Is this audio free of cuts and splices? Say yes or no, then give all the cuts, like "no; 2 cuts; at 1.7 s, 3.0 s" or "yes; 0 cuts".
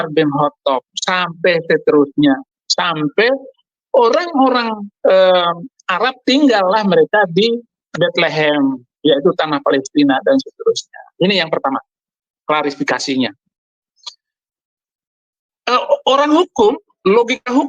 yes; 0 cuts